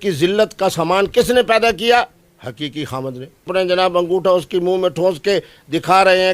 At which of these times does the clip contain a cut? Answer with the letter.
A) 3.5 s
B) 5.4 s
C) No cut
A